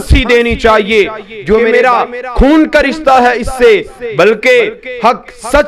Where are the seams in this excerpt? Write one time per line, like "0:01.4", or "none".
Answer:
0:01.7

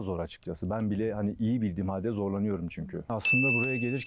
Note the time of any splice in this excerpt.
none

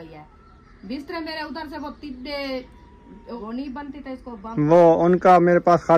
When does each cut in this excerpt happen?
0:03.4

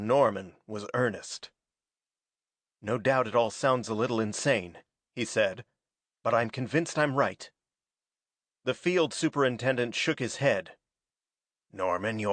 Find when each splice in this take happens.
0:05.7

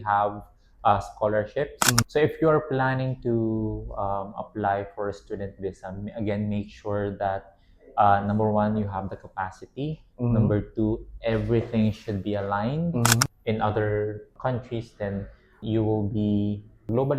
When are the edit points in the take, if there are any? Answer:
0:02.0
0:13.3

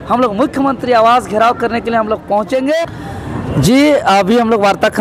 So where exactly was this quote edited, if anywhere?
0:03.0

